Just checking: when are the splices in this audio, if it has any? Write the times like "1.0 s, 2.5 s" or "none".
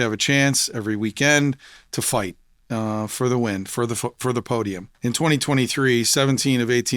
4.9 s